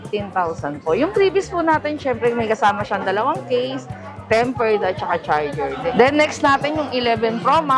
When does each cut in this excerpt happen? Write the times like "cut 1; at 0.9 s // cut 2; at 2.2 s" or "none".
cut 1; at 5.8 s

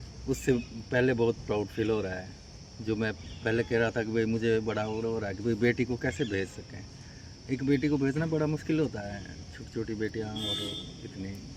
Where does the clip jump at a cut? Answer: none

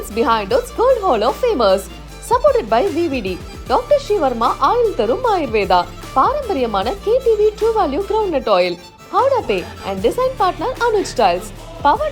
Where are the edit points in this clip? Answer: none

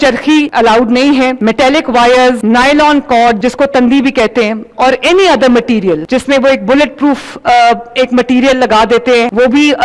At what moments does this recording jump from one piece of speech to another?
none

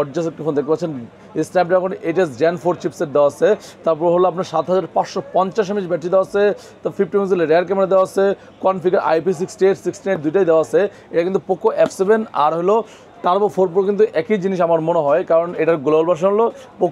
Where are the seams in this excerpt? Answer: none

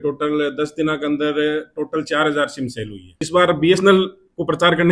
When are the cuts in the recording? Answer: cut 1; at 3.1 s

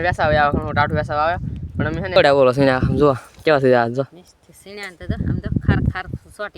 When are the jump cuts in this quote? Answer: cut 1; at 2.2 s

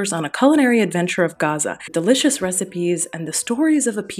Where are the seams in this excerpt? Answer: cut 1; at 1.9 s

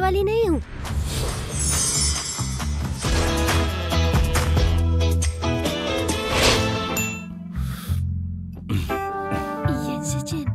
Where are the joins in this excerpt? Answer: cut 1; at 3.0 s // cut 2; at 6.9 s // cut 3; at 9.4 s

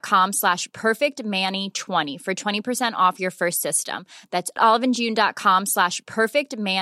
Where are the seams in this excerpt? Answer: cut 1; at 2.1 s

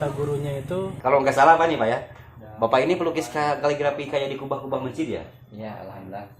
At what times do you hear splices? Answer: cut 1; at 1.0 s

